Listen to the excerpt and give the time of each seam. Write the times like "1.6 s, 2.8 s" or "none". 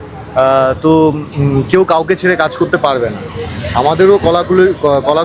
none